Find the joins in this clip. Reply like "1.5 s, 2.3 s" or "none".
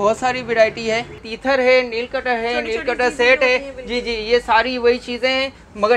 1.3 s

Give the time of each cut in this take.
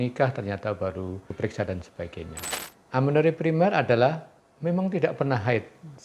2.4 s

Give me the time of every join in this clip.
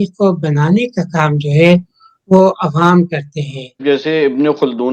3.8 s

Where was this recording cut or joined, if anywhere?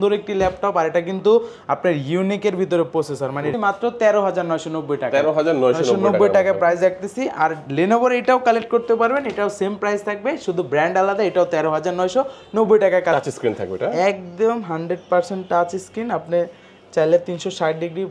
3.5 s, 13.1 s

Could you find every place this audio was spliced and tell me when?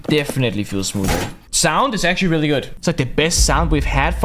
1.4 s, 2.7 s

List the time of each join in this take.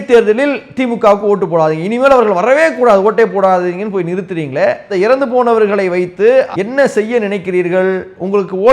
6.5 s

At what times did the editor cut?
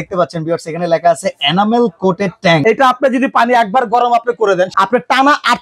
2.6 s, 4.7 s

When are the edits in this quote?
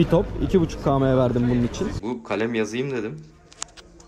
2.0 s

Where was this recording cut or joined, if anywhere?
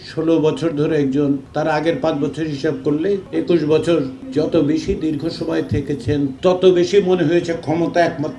1.5 s, 3.3 s, 4.2 s, 6.3 s

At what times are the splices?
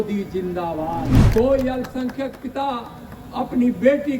1.2 s

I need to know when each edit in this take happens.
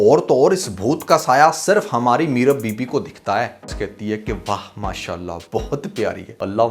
3.7 s

